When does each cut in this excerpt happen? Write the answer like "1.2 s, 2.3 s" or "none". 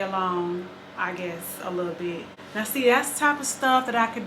2.3 s